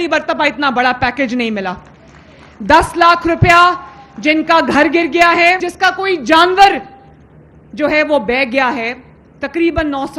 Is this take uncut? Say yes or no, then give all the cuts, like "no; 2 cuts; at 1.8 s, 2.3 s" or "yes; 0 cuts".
no; 1 cut; at 5.7 s